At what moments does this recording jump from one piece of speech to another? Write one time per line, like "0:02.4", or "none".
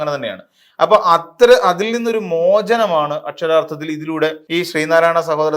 0:04.4